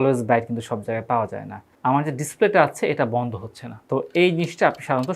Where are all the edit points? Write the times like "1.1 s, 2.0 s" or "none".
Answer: 1.7 s